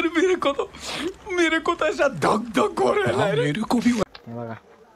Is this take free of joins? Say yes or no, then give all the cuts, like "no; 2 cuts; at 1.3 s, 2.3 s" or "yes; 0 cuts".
no; 1 cut; at 4.0 s